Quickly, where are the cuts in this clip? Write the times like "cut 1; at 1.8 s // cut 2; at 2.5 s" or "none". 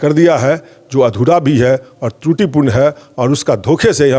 none